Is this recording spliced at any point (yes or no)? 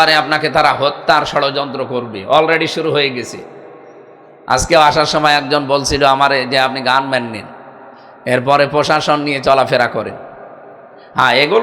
no